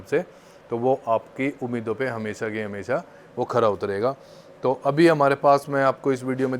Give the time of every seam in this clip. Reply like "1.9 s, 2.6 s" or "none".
none